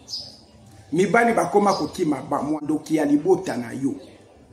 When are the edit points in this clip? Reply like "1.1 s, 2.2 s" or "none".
2.6 s